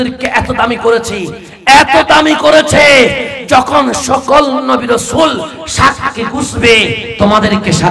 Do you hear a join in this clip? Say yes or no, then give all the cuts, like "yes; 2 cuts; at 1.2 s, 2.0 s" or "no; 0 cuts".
no; 0 cuts